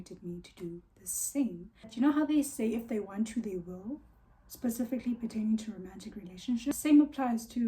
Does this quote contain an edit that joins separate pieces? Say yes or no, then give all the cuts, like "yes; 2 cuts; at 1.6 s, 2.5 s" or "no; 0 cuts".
yes; 2 cuts; at 1.9 s, 6.7 s